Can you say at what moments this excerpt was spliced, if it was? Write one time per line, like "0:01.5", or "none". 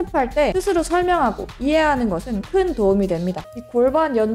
0:03.4